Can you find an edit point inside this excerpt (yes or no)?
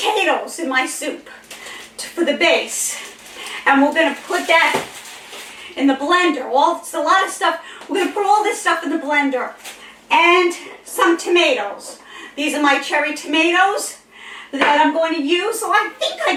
no